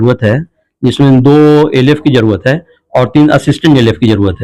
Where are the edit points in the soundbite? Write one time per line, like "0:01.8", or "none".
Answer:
none